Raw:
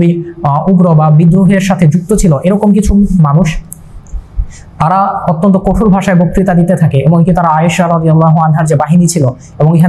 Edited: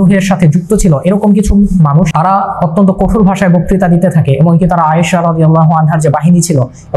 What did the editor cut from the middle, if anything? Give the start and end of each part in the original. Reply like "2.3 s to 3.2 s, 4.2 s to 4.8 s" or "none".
3.5 s to 4.8 s